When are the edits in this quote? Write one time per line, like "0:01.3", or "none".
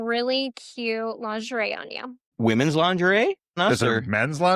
0:02.3
0:03.6